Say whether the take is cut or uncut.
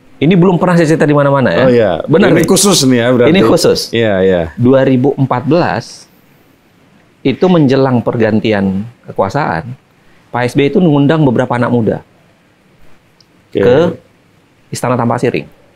uncut